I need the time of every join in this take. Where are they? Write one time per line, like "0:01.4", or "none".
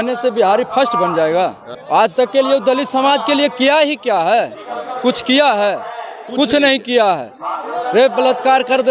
0:02.1